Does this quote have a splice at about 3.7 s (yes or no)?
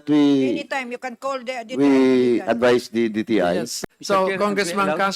yes